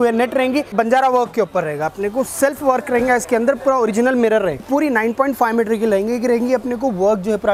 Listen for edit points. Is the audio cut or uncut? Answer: cut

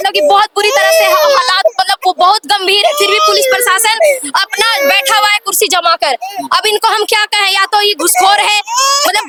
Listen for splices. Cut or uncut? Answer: uncut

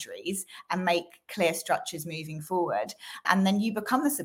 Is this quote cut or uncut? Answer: cut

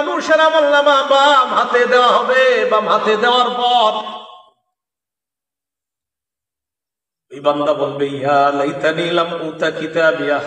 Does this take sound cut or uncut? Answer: uncut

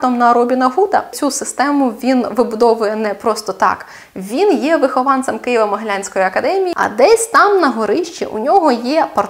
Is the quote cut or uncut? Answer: cut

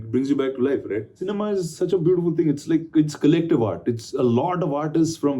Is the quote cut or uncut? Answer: cut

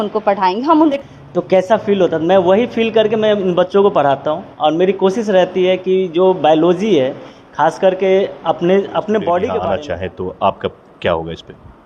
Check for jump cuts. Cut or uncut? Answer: cut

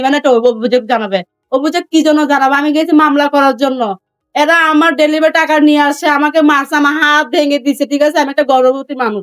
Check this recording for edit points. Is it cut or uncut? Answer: uncut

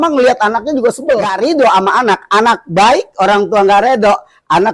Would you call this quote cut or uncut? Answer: cut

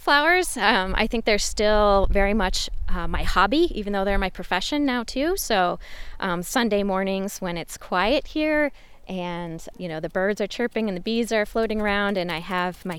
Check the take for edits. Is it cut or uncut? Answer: uncut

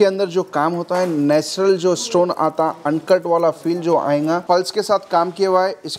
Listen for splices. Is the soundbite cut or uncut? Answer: cut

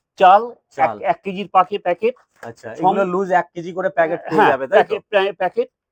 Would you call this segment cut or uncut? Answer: uncut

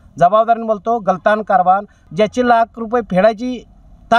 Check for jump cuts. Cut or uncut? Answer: cut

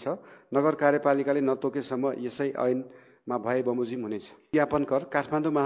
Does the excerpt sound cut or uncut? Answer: cut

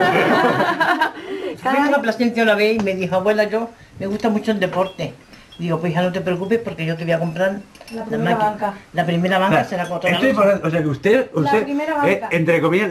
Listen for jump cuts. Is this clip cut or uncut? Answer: cut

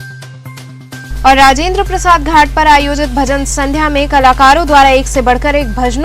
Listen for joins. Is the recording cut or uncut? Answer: cut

